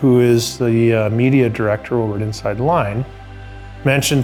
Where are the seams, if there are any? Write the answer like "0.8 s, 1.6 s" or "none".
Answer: none